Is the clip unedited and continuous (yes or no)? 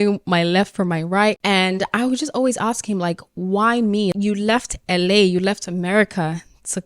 yes